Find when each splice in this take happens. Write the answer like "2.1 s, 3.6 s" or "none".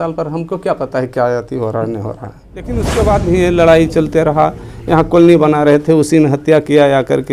2.8 s